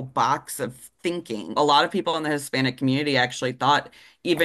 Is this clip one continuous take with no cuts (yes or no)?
no